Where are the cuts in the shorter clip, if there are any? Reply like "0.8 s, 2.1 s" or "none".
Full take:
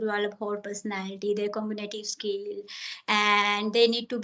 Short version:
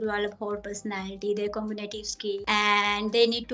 2.4 s